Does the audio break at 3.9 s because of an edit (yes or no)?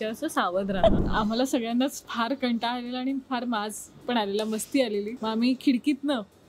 no